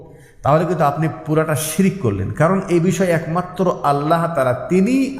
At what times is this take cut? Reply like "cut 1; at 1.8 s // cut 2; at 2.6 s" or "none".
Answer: none